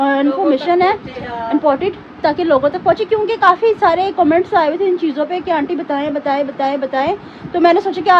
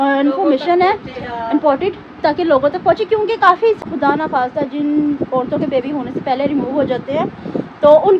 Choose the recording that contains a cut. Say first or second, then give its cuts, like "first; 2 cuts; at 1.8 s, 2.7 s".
second; 1 cut; at 3.8 s